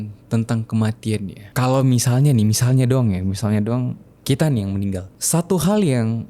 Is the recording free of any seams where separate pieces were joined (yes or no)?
no